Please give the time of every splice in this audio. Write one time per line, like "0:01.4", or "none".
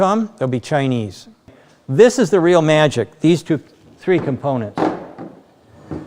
0:01.5

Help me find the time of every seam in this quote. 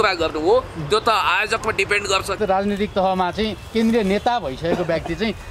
0:02.4

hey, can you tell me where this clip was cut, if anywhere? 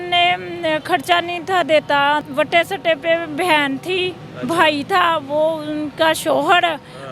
0:02.2

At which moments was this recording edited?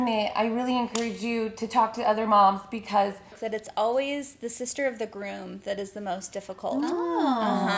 0:03.4

